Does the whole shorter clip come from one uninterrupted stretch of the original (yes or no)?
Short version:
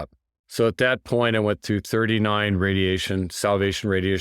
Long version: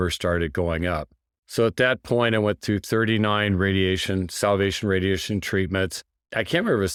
yes